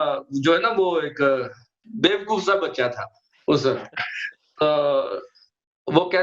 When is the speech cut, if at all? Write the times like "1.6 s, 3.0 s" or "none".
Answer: 1.8 s